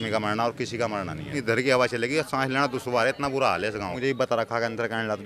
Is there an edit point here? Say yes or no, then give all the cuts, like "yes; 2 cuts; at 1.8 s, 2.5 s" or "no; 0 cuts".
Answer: yes; 2 cuts; at 1.4 s, 3.9 s